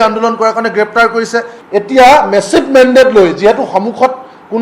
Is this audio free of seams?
no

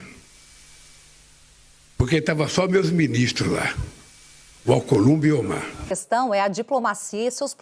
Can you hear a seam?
yes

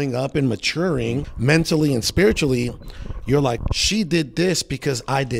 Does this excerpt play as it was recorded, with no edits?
no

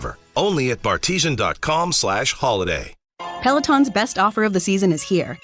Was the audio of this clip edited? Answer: yes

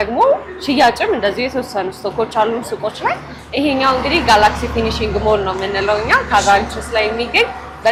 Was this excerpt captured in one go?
yes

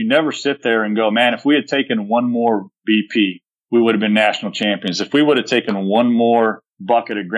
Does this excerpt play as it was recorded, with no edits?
yes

